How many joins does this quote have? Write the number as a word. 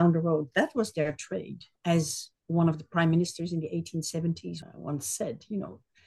one